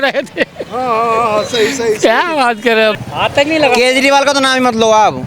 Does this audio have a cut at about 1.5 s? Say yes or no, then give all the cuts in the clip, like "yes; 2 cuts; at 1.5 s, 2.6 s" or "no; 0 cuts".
no; 1 cut; at 2.9 s